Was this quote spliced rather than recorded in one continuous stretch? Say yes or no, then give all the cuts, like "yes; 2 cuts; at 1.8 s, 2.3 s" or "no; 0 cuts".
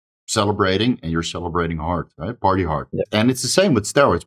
yes; 1 cut; at 3.1 s